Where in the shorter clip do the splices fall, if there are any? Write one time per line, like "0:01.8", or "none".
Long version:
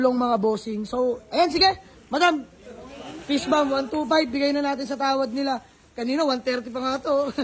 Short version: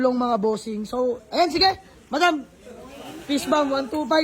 none